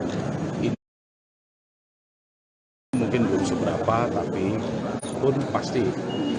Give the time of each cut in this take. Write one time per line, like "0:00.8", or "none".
0:05.2